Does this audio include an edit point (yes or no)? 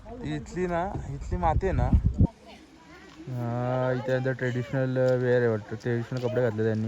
yes